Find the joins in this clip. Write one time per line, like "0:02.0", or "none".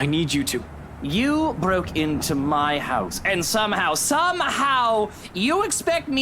0:01.0